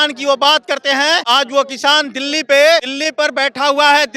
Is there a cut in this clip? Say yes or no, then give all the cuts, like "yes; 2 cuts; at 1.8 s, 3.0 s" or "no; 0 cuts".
yes; 2 cuts; at 1.2 s, 3.0 s